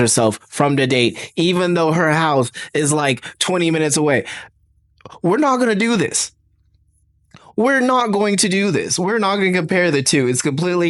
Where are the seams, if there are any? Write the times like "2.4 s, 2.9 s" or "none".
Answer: none